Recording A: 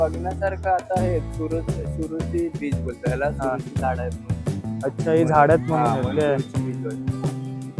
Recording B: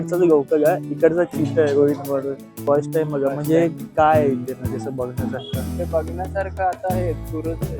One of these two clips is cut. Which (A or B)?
B